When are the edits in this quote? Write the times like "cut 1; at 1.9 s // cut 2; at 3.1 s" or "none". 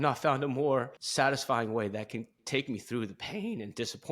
cut 1; at 1.0 s